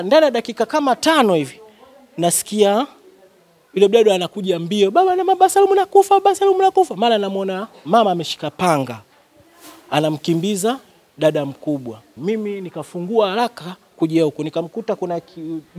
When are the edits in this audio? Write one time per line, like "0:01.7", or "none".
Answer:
0:12.1

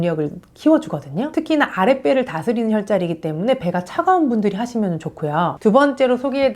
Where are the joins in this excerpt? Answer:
0:05.6

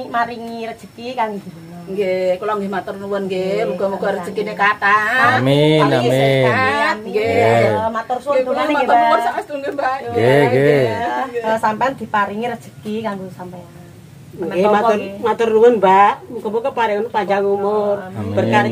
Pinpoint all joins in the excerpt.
0:11.3

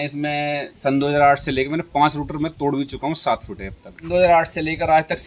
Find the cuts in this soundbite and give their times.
0:04.1

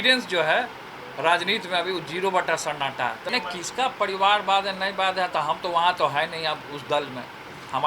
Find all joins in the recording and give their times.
0:03.3

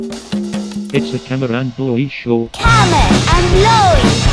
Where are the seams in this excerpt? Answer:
none

